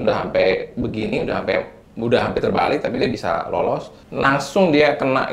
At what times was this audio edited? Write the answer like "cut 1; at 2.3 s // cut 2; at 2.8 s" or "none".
cut 1; at 4.0 s